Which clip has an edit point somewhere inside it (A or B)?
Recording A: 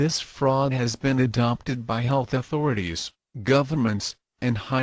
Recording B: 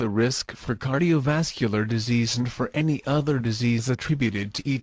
B